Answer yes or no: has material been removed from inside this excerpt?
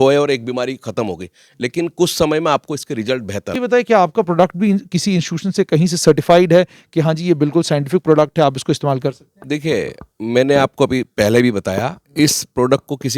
yes